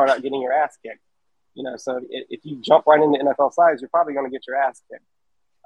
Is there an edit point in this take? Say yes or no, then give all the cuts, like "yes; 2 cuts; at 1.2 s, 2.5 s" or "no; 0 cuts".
no; 0 cuts